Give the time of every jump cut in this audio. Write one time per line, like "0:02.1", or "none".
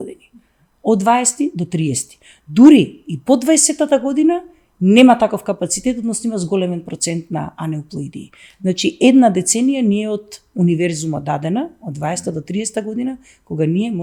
none